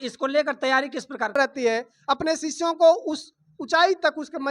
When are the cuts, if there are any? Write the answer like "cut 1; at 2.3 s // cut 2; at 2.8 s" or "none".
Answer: cut 1; at 1.3 s